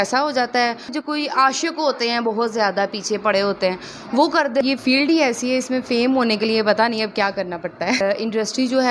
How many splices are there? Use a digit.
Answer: 3